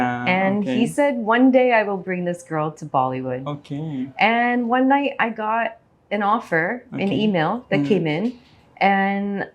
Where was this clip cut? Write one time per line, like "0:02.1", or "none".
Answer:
none